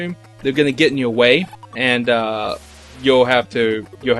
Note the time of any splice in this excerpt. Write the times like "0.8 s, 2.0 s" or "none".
1.6 s